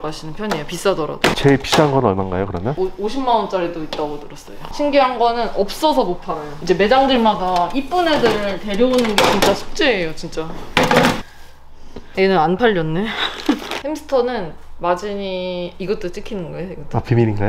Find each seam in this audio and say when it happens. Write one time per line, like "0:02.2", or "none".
0:02.7
0:04.6
0:06.5